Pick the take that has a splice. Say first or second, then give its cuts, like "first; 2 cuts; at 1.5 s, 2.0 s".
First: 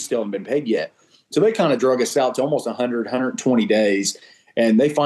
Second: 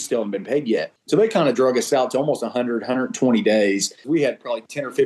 second; 2 cuts; at 0.9 s, 4.0 s